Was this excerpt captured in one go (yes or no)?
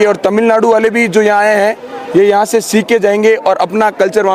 yes